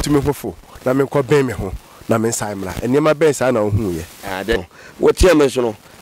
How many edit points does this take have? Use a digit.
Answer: 1